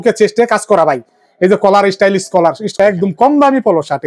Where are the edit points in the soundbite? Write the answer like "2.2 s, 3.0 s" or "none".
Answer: 2.7 s